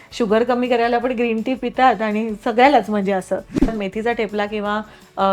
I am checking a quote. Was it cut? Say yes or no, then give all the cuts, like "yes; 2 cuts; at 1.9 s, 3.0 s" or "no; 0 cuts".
yes; 1 cut; at 3.8 s